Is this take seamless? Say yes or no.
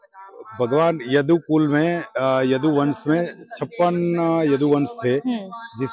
yes